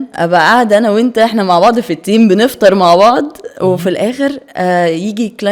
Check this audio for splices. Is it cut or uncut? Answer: uncut